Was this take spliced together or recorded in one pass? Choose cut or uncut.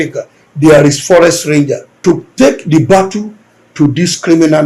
cut